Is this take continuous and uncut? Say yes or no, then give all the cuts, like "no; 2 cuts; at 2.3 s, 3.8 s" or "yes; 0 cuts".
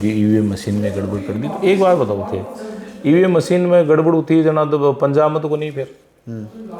yes; 0 cuts